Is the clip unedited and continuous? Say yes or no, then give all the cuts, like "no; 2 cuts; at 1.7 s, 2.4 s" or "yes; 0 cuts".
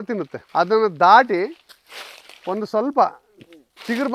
yes; 0 cuts